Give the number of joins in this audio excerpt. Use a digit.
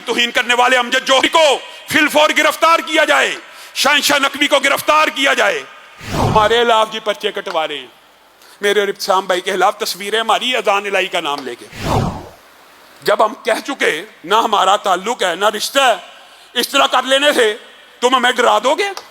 1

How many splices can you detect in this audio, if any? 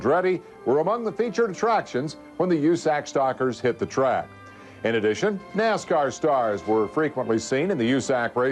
1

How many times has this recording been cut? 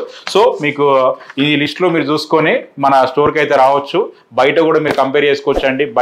0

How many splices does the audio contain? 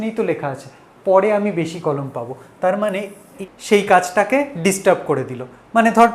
1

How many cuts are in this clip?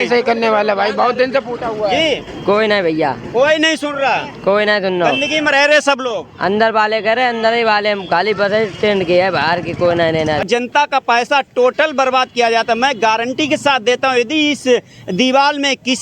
1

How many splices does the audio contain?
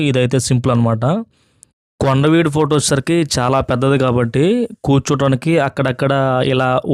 1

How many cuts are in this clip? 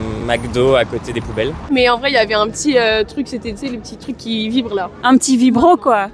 2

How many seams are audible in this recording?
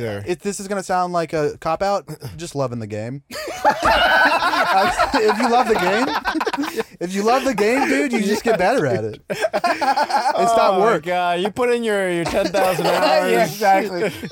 0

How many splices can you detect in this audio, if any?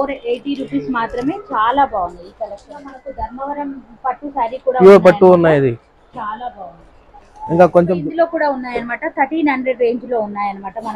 2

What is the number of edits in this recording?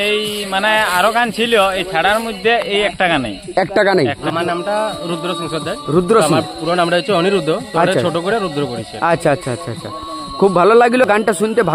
1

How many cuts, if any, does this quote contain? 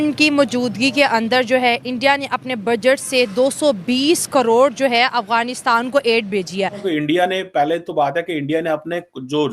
1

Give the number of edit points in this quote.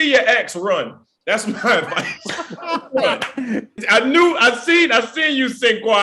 1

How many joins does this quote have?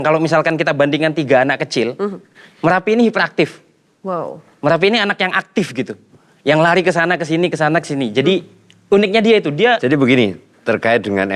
1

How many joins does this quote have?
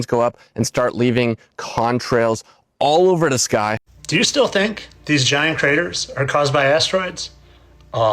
1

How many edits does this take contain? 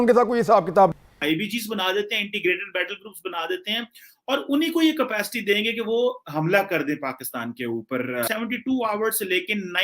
2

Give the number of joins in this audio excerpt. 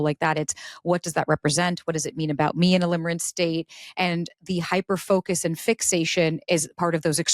0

